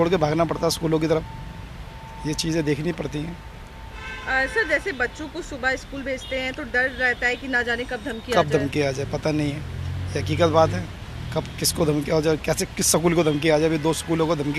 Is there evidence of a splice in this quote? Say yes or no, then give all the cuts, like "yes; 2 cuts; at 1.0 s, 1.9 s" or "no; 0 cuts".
no; 0 cuts